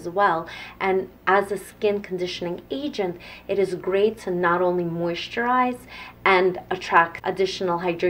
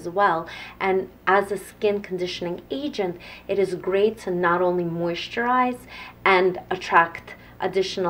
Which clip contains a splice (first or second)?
first